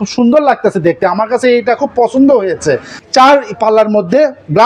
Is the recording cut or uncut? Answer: cut